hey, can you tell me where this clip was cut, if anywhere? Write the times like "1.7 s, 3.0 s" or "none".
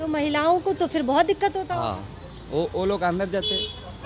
none